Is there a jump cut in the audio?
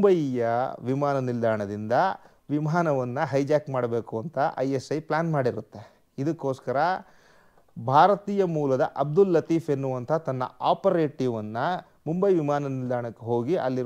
no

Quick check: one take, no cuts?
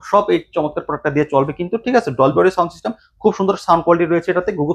yes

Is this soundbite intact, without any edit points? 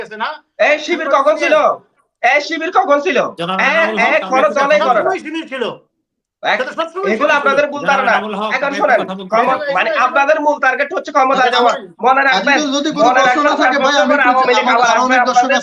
yes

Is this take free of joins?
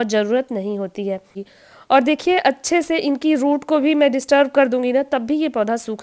no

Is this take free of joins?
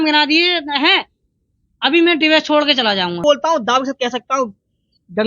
no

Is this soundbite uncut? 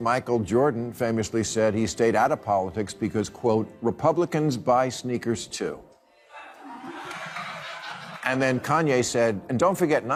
yes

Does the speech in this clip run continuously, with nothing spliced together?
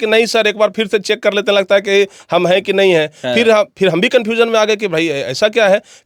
yes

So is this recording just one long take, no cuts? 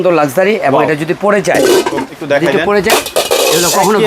no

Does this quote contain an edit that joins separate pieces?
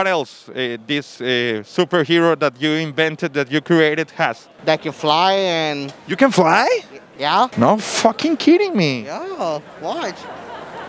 no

